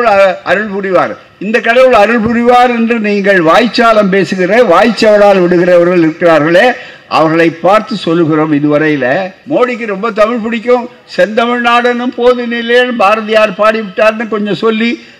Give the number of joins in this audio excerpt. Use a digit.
1